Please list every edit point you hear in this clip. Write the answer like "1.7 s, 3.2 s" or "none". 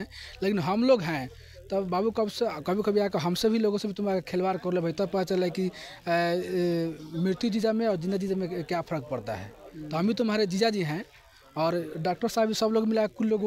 none